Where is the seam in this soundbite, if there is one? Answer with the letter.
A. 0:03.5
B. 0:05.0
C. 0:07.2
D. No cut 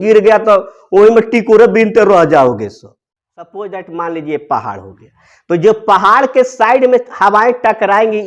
A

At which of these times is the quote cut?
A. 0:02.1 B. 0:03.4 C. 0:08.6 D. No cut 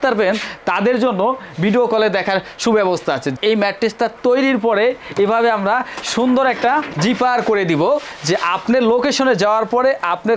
B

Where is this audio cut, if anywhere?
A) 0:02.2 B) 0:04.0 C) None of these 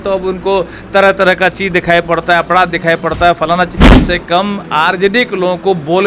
B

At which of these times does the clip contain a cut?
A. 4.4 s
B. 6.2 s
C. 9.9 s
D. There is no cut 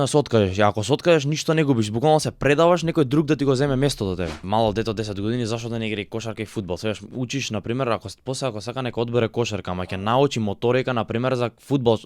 A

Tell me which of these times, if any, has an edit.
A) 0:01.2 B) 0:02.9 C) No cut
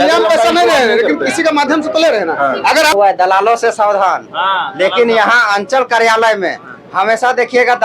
B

